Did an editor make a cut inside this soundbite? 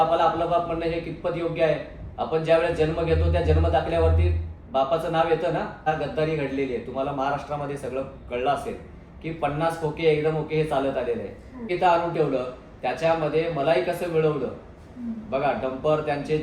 yes; 2 cuts; at 5.9 s, 11.6 s

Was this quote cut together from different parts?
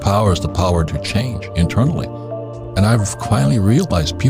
no; 0 cuts

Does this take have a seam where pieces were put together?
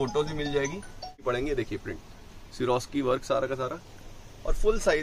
yes; 1 cut; at 1.2 s

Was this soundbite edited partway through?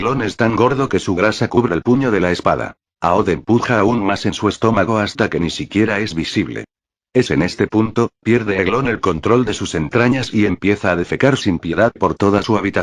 yes; 1 cut; at 10.8 s

